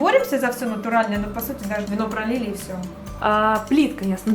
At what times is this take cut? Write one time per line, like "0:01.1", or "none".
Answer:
0:01.9
0:03.0